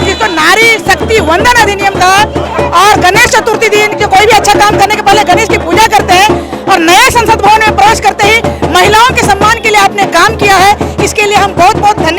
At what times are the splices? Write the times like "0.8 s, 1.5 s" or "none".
none